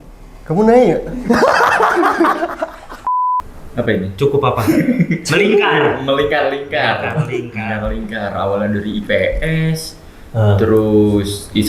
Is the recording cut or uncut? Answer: cut